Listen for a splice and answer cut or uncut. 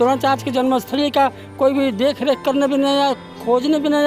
uncut